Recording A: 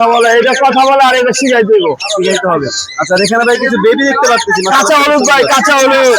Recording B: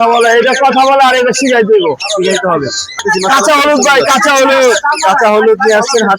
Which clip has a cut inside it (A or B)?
B